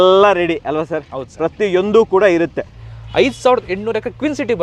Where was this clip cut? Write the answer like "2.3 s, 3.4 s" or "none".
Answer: 2.7 s